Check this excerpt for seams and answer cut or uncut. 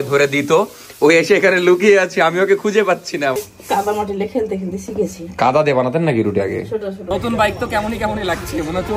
cut